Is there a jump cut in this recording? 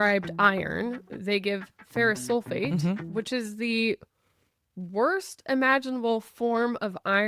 no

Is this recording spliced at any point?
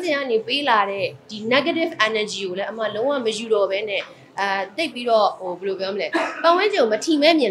no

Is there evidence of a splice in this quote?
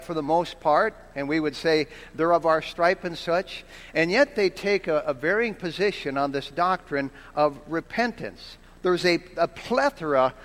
yes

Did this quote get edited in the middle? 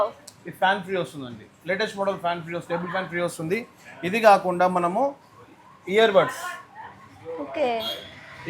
no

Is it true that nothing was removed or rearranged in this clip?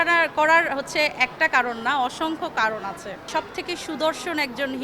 no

